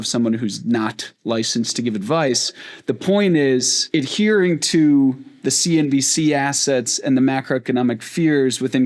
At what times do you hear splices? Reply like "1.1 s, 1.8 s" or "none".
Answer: 3.8 s